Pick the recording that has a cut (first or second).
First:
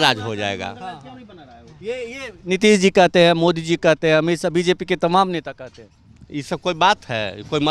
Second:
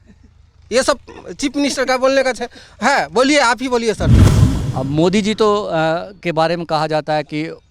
second